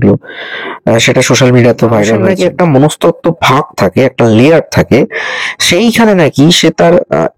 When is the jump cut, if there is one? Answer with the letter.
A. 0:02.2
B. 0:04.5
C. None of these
A